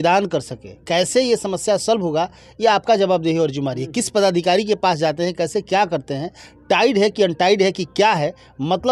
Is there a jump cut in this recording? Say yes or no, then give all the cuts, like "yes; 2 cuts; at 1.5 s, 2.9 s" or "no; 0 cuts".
no; 0 cuts